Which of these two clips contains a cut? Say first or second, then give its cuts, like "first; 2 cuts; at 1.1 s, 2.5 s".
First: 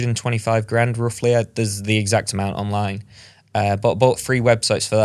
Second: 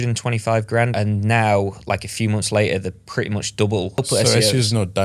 second; 2 cuts; at 0.9 s, 4.0 s